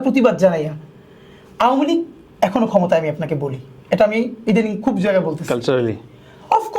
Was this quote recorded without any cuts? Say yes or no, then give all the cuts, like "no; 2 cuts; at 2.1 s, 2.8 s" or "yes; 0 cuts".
yes; 0 cuts